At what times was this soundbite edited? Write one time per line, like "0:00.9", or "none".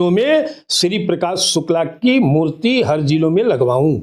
none